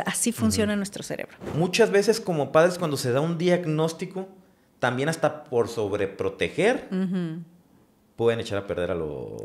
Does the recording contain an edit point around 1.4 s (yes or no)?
yes